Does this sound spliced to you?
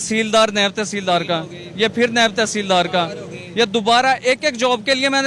no; 0 cuts

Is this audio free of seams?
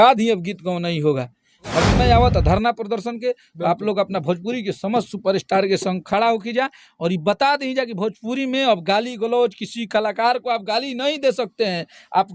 no; 1 cut; at 1.9 s

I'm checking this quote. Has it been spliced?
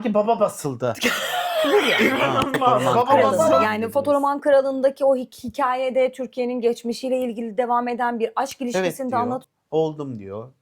yes; 2 cuts; at 3.6 s, 9.4 s

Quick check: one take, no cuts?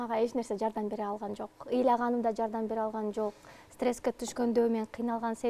yes; 0 cuts

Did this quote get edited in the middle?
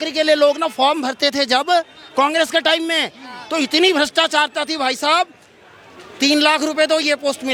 no; 0 cuts

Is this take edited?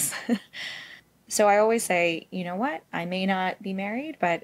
yes; 1 cut; at 1.1 s

